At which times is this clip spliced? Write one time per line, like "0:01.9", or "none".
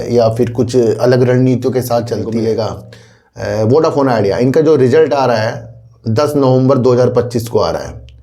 0:02.3